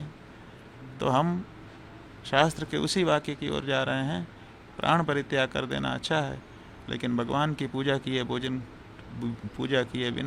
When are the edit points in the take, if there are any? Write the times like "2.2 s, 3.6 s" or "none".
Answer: none